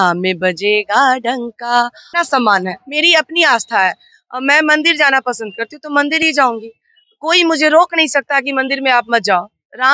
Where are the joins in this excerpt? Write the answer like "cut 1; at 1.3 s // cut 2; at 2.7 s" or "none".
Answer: cut 1; at 2.0 s